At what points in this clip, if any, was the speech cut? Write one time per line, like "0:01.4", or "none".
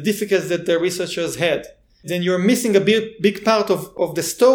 0:02.1